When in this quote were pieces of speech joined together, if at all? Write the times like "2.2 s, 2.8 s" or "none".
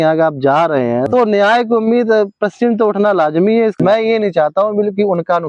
1.1 s, 3.8 s